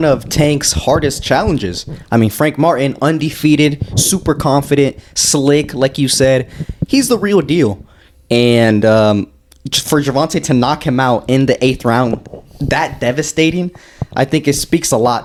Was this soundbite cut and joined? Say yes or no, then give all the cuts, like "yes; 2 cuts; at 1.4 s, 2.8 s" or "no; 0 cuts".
no; 0 cuts